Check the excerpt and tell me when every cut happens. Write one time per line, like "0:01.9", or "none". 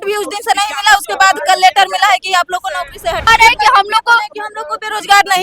0:03.3